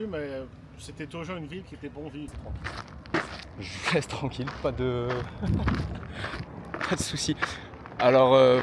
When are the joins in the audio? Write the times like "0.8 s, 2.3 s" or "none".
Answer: 2.4 s